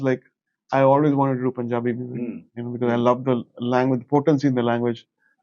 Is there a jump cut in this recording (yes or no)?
no